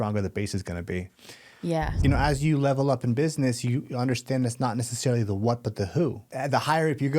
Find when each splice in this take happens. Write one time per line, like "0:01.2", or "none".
0:02.0
0:06.3